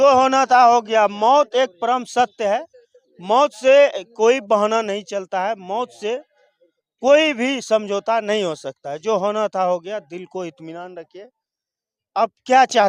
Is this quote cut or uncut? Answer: uncut